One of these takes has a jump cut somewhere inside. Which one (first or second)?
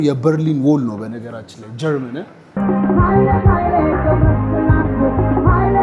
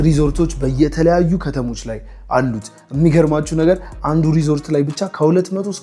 first